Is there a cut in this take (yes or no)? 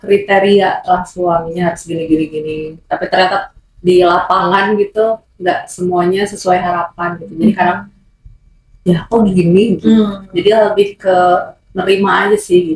no